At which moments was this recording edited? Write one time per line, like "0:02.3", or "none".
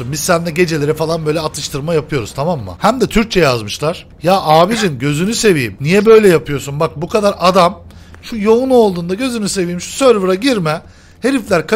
0:02.7
0:04.1
0:05.7